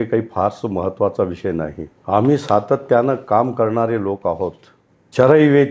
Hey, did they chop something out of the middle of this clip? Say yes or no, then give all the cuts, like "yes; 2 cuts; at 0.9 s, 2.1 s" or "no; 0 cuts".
yes; 1 cut; at 1.9 s